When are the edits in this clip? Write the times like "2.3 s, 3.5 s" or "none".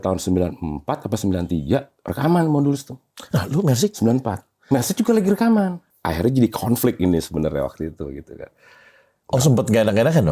5.9 s